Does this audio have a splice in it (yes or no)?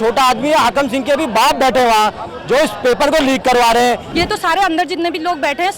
yes